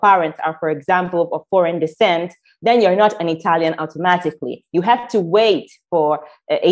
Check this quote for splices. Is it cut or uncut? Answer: uncut